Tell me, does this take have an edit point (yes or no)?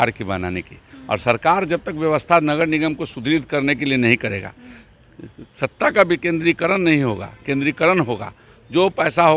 no